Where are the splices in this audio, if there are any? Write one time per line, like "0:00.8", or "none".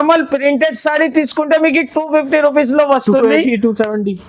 none